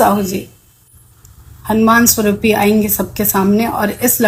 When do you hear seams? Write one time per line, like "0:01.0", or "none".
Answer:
none